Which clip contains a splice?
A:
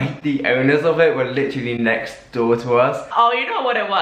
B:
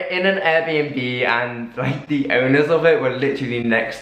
A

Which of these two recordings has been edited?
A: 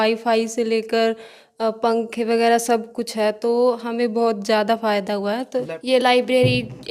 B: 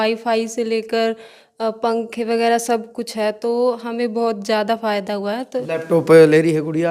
A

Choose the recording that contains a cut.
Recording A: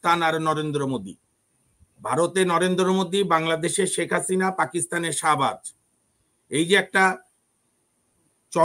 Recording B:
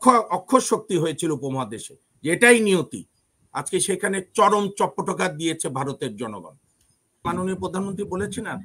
B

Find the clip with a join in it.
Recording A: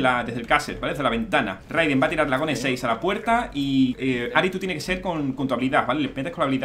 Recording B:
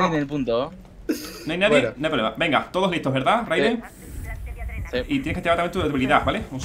A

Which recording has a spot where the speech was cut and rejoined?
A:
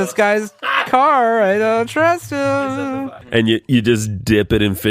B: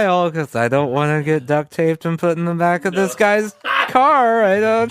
A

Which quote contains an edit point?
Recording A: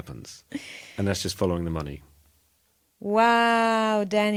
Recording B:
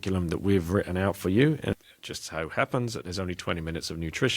B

